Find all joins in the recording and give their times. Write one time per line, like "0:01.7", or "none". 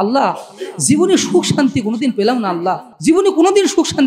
0:02.9